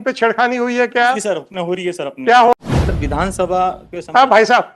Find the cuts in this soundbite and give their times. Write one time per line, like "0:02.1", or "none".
0:02.5